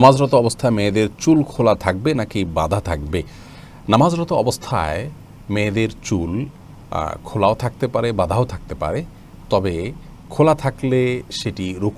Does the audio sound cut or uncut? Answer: uncut